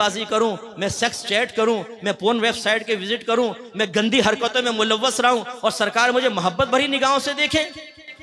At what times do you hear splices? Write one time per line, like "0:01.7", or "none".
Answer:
none